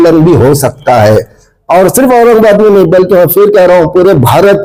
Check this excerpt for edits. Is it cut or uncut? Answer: uncut